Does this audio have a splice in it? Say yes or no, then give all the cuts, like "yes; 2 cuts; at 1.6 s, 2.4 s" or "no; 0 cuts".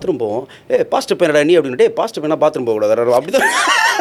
no; 0 cuts